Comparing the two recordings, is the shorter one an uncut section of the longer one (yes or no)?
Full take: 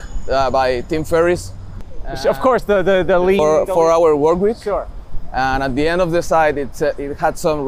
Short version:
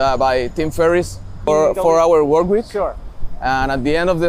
no